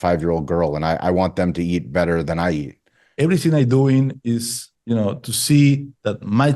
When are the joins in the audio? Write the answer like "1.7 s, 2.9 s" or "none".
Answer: 3.0 s